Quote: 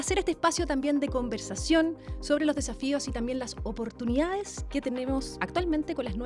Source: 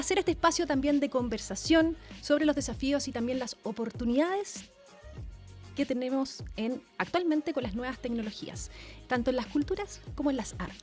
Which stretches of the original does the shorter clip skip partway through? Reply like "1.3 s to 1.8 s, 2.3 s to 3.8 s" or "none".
4.6 s to 5.6 s, 6.4 s to 7.0 s